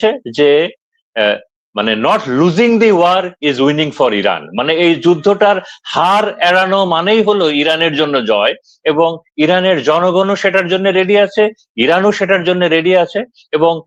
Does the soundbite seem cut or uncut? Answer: uncut